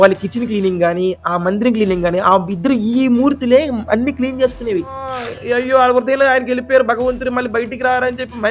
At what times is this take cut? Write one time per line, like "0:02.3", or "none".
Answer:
0:05.1

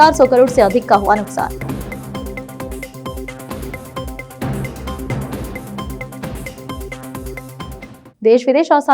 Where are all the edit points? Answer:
none

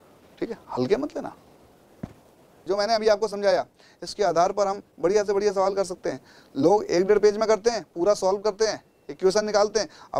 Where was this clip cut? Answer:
0:02.7

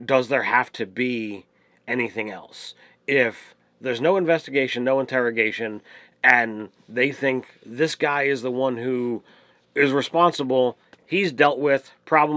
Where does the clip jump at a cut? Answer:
none

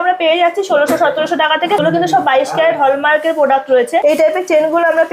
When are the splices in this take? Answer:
0:01.8
0:04.0

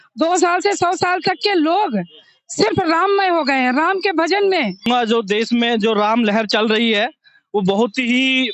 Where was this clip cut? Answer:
0:04.9

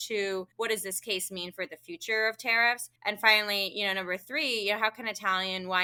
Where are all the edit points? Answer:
none

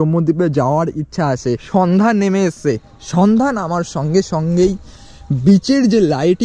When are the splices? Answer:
0:01.6

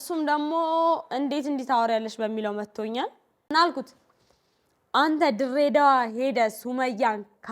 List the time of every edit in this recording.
0:03.3

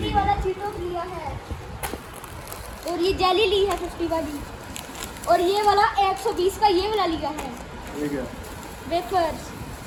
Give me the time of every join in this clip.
none

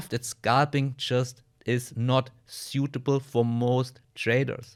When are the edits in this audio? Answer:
none

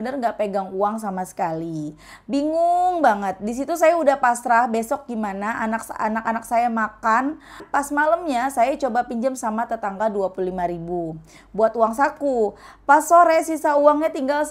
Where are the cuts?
0:07.6

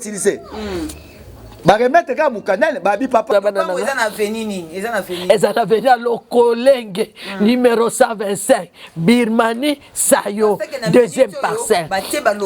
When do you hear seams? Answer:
0:03.2

